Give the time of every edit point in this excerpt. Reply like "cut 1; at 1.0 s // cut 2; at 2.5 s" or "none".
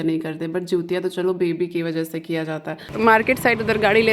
cut 1; at 2.9 s